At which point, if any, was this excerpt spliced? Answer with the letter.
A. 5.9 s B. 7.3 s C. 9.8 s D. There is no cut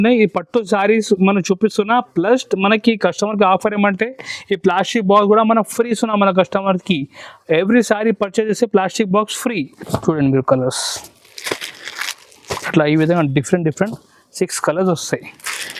C